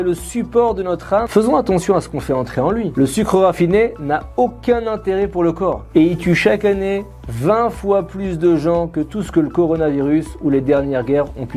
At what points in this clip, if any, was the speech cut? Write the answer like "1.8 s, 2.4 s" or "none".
1.3 s, 2.9 s, 5.9 s